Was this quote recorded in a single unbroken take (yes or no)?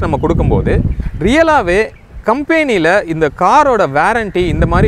yes